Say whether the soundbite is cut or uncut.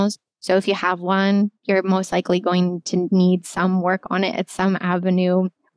uncut